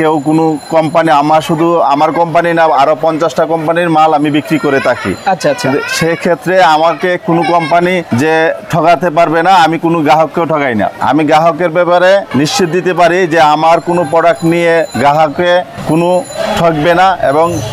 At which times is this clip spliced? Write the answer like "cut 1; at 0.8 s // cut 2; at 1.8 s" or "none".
cut 1; at 8.1 s // cut 2; at 11.0 s // cut 3; at 12.3 s // cut 4; at 14.9 s // cut 5; at 15.8 s